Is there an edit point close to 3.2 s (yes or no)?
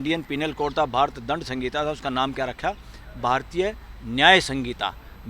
no